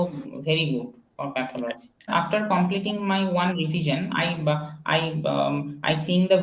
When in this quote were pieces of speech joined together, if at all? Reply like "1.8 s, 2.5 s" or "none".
2.1 s